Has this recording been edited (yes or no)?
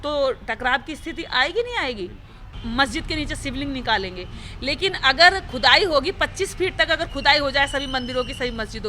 yes